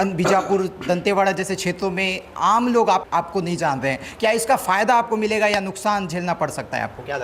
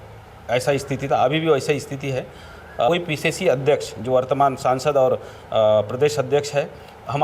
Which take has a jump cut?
second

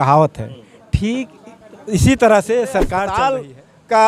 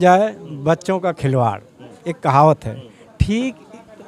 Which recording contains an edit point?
first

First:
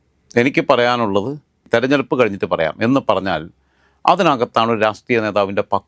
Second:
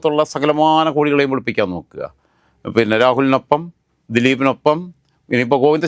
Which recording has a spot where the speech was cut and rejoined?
first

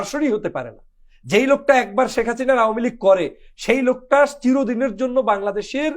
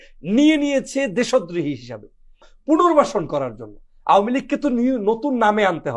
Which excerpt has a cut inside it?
second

